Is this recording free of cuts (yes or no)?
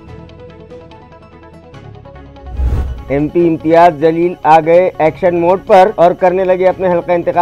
no